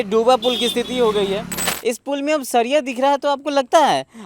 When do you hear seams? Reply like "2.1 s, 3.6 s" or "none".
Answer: 1.6 s